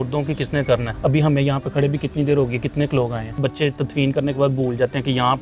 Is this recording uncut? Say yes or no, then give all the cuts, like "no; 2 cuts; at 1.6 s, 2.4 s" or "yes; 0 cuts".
no; 2 cuts; at 0.9 s, 3.3 s